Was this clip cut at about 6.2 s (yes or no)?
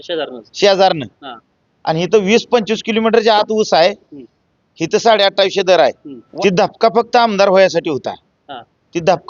yes